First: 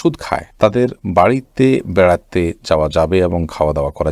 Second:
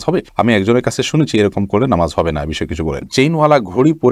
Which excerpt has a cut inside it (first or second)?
second